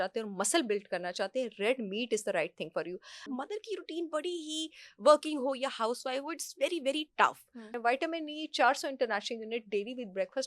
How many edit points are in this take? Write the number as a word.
two